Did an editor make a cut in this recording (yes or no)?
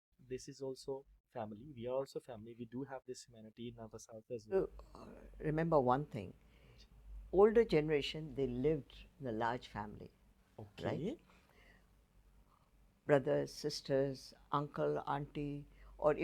yes